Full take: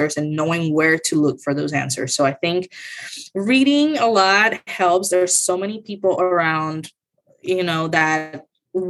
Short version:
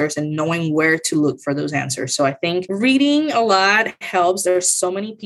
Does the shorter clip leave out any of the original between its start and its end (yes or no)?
yes